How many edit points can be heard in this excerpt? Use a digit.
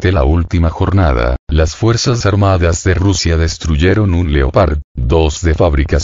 1